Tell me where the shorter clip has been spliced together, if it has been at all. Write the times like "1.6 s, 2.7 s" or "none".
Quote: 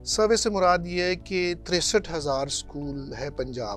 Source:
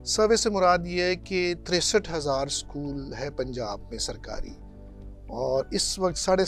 none